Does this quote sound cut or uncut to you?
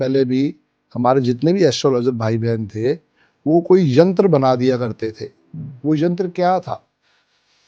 uncut